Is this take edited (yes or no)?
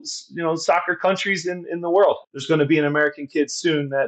yes